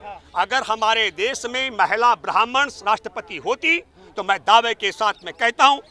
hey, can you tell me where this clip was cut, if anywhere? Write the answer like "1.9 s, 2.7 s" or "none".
none